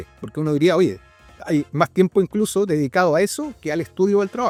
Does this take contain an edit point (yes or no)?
no